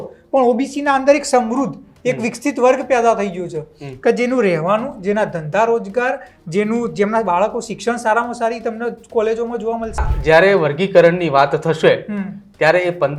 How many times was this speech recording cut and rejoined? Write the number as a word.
one